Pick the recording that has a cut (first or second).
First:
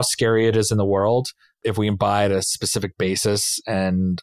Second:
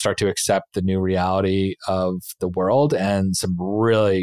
first